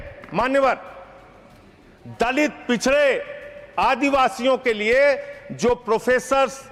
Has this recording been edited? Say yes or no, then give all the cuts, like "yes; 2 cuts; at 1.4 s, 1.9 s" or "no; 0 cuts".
no; 0 cuts